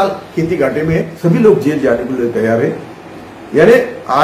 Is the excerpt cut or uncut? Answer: cut